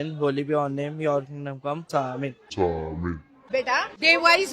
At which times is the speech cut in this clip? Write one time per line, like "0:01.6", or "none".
0:01.9
0:03.4